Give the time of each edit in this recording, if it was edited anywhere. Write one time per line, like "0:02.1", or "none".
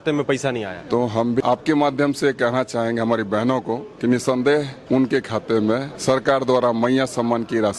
0:01.4
0:03.9
0:04.8
0:05.9